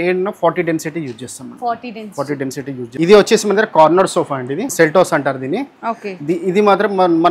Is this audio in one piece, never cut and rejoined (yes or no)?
no